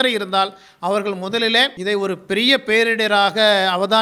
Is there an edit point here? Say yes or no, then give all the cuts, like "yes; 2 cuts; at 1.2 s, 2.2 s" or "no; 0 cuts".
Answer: yes; 1 cut; at 1.8 s